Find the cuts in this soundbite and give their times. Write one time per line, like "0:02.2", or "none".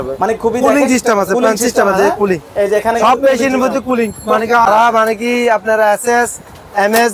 0:04.7